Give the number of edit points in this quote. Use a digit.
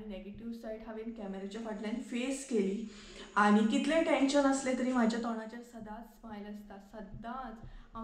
0